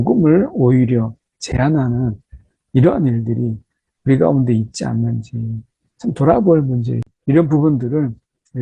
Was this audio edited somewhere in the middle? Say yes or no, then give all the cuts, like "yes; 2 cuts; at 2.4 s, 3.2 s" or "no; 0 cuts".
yes; 1 cut; at 7.0 s